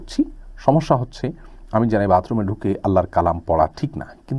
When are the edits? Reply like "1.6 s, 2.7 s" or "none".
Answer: none